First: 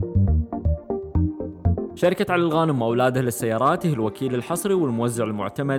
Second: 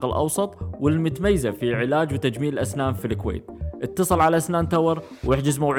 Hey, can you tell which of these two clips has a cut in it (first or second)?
first